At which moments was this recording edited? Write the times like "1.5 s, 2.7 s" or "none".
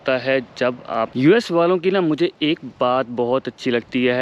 1.1 s